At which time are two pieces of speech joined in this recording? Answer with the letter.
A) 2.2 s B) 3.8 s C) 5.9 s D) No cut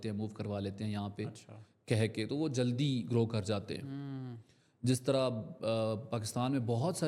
D